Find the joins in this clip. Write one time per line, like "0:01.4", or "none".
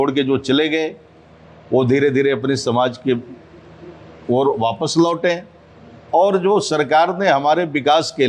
none